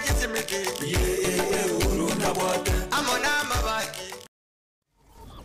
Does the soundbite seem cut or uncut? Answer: cut